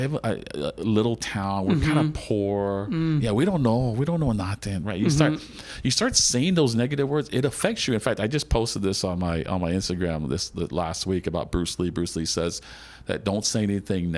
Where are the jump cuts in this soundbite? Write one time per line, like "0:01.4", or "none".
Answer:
none